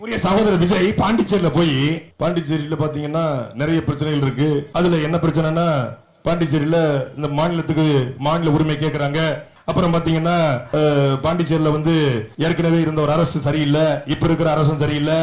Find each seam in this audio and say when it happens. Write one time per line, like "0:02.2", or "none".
0:02.1
0:04.7
0:09.5
0:10.6
0:12.3